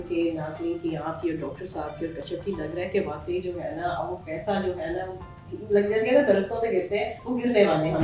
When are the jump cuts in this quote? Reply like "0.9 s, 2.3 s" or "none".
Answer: none